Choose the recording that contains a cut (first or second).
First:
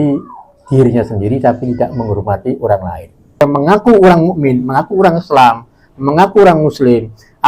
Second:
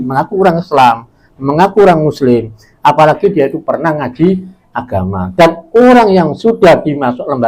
first